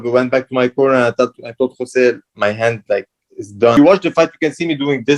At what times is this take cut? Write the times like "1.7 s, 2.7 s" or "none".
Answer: 3.8 s